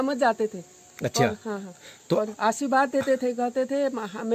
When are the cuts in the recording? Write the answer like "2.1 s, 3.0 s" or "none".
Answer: none